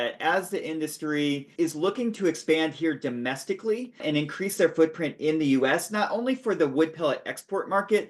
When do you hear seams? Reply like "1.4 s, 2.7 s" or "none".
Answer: 1.5 s, 4.0 s

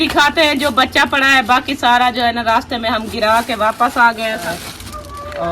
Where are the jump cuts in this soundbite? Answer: 4.4 s

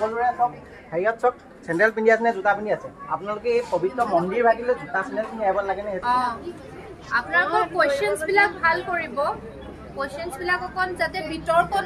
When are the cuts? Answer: 6.0 s

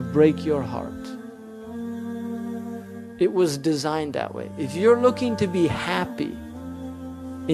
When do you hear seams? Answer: none

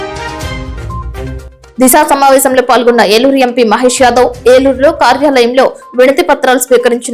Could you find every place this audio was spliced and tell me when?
1.2 s

